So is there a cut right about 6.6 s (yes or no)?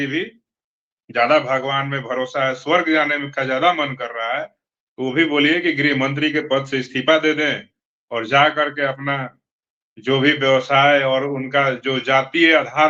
no